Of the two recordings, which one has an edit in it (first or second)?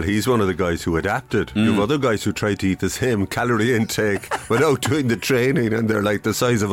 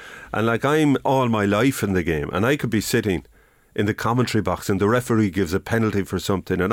second